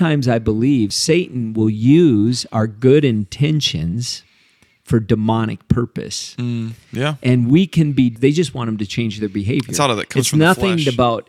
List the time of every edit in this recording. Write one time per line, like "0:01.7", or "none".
0:01.0
0:08.1